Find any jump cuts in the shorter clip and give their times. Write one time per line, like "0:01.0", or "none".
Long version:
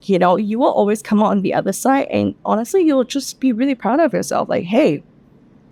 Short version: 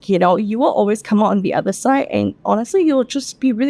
none